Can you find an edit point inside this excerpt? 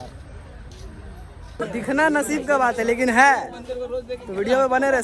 yes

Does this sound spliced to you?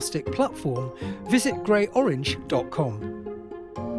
no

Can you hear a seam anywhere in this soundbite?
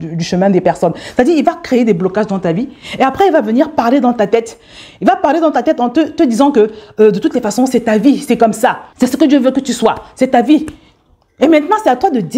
no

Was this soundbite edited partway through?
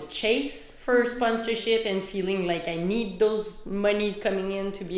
no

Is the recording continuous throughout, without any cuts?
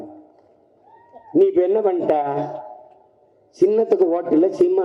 yes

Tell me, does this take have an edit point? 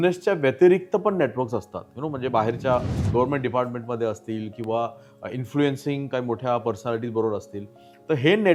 no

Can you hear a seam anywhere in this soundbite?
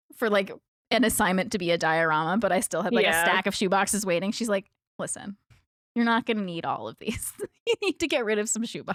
no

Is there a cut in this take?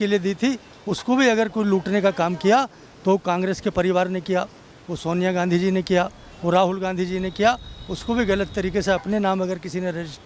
no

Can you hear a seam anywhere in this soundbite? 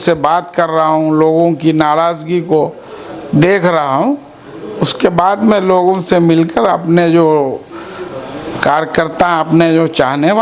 no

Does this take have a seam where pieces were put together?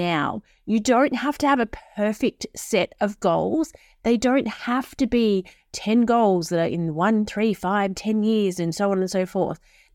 no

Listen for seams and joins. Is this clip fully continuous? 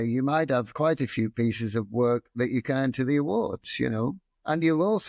yes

